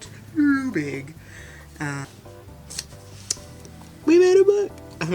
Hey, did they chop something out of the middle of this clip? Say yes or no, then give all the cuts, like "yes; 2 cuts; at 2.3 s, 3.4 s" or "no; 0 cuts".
yes; 1 cut; at 2.1 s